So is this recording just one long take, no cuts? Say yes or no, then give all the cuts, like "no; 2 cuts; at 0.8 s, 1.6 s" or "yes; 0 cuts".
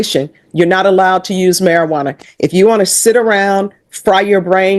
yes; 0 cuts